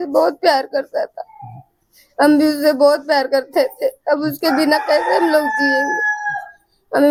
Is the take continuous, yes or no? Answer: yes